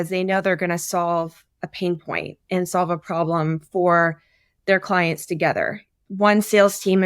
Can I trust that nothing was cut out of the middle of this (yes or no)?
no